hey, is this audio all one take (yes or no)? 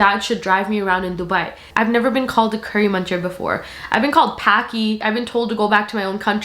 no